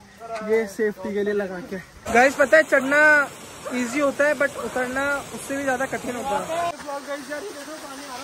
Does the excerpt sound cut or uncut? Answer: cut